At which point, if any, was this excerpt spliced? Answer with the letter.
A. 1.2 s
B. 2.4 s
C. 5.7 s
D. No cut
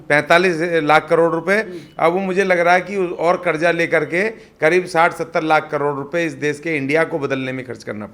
D